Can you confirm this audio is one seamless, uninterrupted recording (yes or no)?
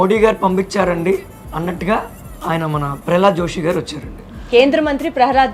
yes